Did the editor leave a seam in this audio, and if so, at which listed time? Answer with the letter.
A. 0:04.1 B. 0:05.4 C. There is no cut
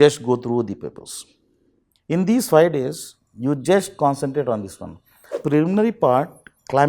B